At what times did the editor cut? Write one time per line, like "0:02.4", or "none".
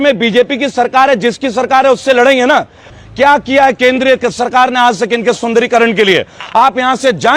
0:02.9

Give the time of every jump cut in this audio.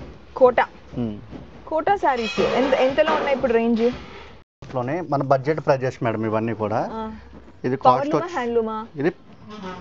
0:04.7

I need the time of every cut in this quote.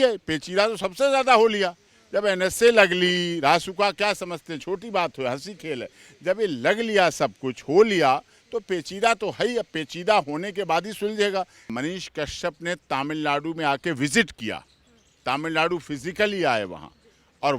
0:11.7

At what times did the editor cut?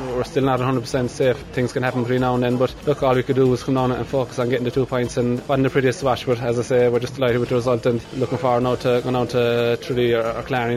0:01.4
0:02.8
0:05.4
0:08.1

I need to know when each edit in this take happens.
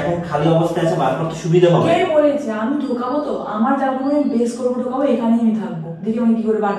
none

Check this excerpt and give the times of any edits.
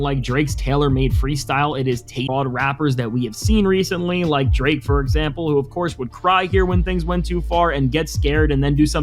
0:02.3

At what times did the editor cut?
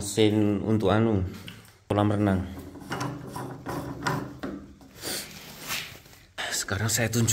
0:01.9
0:06.4

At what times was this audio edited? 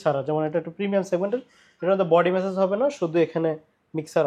none

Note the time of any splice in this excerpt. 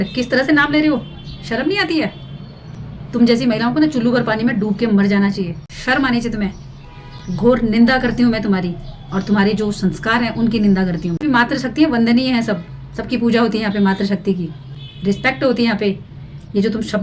0:05.5
0:11.1

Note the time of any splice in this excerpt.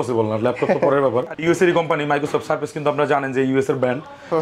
0:01.4

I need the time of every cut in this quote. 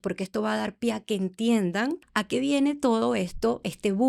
0:02.1

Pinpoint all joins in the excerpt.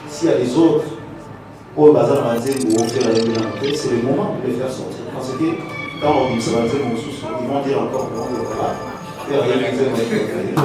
none

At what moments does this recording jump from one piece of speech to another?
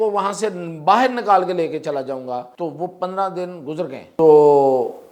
0:02.5
0:04.0

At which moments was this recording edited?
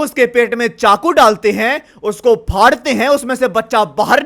none

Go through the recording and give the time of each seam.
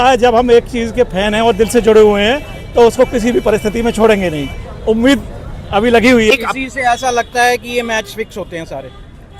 0:06.3

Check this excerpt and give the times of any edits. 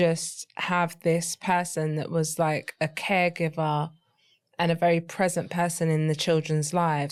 none

